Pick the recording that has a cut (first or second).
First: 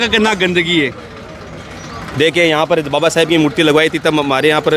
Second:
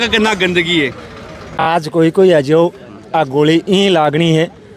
second